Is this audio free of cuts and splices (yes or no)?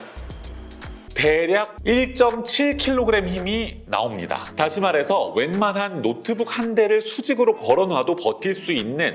no